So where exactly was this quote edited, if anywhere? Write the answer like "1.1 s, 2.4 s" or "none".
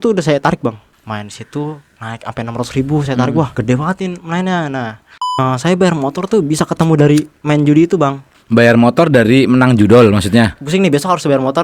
0.9 s, 3.5 s, 5.4 s, 8.3 s, 10.6 s